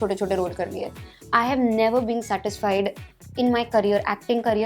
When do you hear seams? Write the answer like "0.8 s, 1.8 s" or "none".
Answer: none